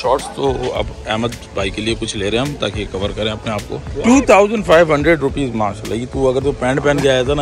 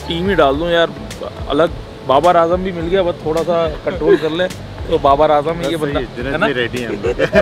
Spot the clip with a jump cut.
first; 1 cut; at 3.9 s

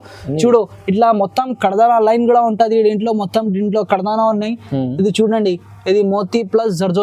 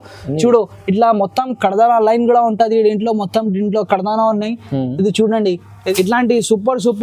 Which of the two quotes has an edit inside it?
second; 1 cut; at 5.8 s

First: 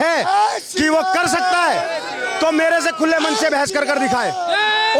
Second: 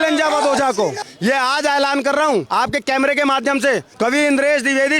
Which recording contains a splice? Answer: second; 3 cuts; at 1.0 s, 2.5 s, 3.9 s

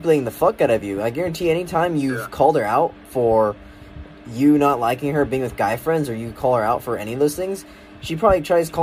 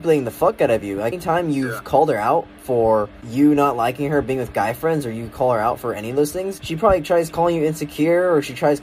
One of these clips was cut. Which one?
second; 3 cuts; at 1.2 s, 3.2 s, 6.6 s

